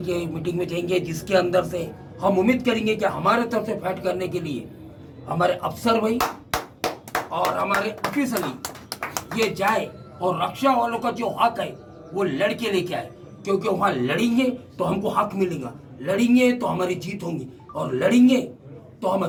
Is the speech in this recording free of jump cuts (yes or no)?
yes